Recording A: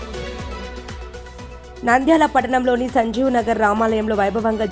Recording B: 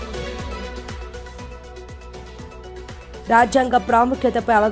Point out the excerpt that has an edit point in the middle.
B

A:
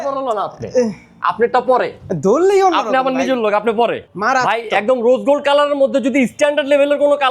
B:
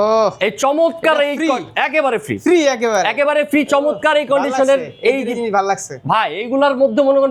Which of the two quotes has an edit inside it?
A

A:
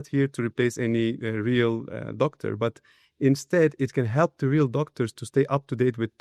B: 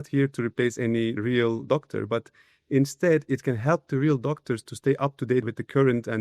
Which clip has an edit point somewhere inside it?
B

